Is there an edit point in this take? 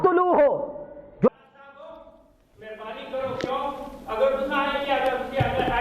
yes; 1 cut; at 1.3 s

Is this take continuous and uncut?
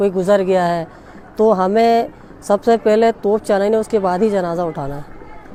yes; 0 cuts

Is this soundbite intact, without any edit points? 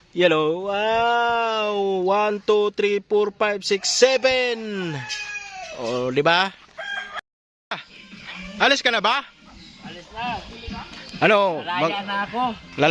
no; 1 cut; at 7.2 s

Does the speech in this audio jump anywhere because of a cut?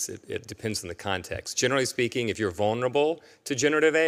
no; 0 cuts

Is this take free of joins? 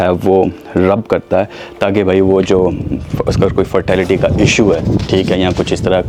yes; 0 cuts

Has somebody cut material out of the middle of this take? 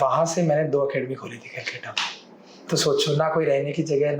no; 0 cuts

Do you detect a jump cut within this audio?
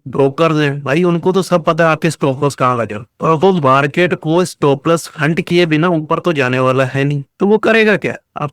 no; 0 cuts

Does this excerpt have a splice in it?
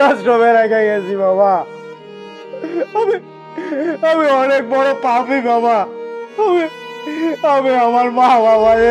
no; 0 cuts

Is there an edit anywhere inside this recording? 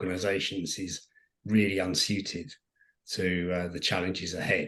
no; 0 cuts

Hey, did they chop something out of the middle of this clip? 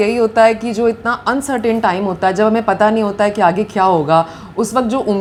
no; 0 cuts

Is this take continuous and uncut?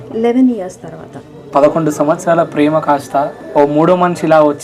no; 2 cuts; at 1.4 s, 3.4 s

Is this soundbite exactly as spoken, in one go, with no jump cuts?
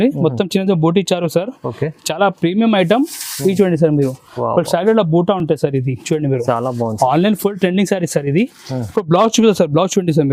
yes; 0 cuts

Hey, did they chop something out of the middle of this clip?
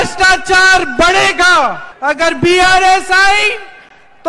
no; 0 cuts

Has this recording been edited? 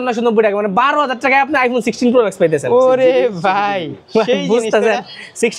no; 0 cuts

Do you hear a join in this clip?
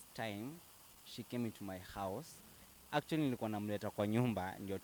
no; 0 cuts

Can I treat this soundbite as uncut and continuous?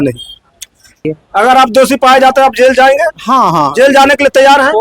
no; 1 cut; at 1.1 s

